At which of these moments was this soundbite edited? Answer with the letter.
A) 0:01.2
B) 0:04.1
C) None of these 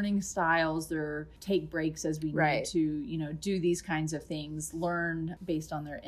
A